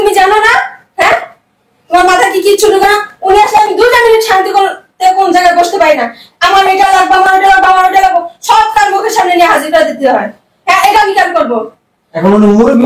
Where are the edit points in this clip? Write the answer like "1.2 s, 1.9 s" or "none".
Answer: none